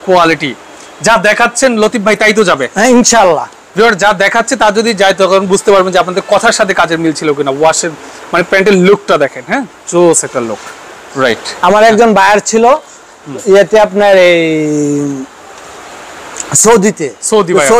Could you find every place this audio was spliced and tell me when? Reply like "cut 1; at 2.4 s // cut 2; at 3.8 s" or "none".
none